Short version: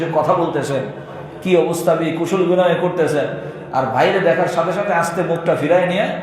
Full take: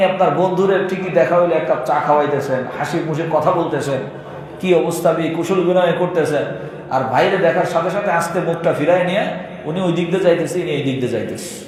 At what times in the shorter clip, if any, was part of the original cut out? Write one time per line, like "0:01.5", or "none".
none